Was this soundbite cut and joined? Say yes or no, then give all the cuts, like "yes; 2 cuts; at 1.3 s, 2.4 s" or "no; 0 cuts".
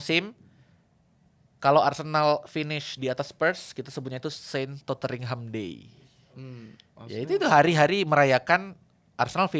no; 0 cuts